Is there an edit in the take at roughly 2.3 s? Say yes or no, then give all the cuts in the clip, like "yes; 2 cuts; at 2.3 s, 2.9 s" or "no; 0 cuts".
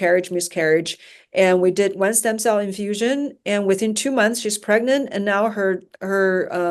no; 0 cuts